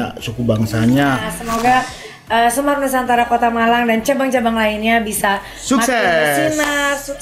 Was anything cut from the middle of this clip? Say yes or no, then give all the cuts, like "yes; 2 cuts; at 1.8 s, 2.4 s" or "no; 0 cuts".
yes; 1 cut; at 1.3 s